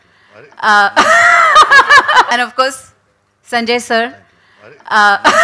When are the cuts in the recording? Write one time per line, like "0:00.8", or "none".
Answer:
0:02.3